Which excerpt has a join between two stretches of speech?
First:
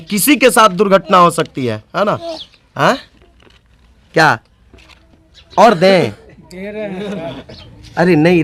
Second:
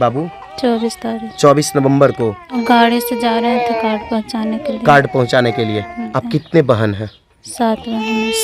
second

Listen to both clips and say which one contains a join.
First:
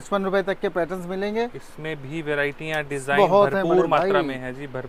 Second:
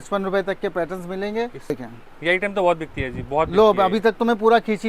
second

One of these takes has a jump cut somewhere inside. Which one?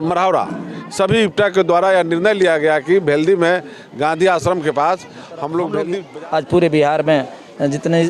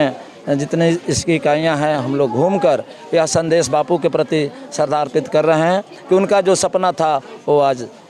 first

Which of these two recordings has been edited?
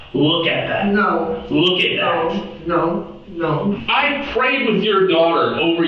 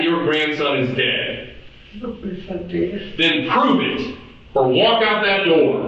first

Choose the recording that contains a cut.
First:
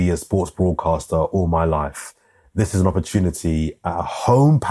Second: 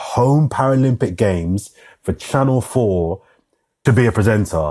second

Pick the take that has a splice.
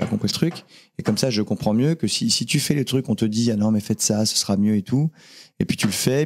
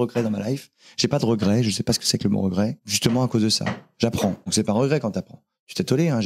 second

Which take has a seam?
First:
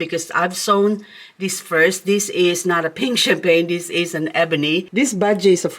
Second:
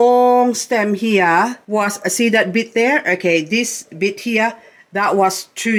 first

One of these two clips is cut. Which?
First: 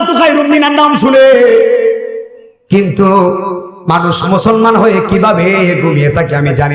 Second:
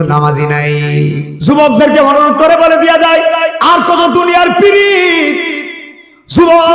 second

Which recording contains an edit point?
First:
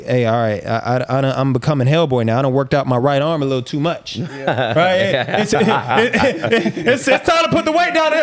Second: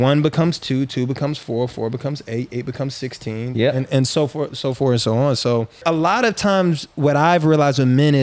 second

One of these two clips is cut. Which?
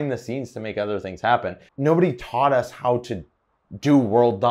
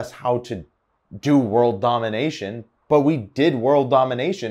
first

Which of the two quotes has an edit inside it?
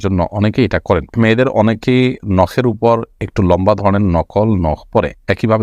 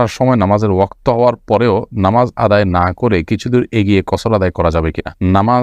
first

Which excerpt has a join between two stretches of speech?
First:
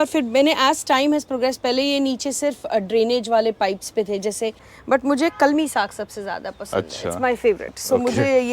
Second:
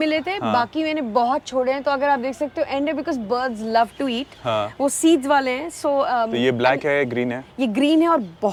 first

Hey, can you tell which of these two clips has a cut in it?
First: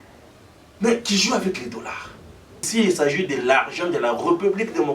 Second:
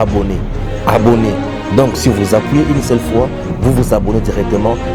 first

